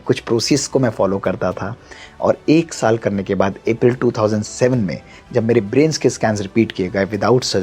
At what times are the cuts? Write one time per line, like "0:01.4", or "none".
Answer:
none